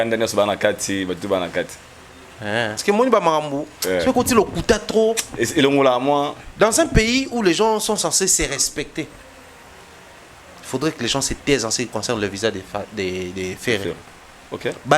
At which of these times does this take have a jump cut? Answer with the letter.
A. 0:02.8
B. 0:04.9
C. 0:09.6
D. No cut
A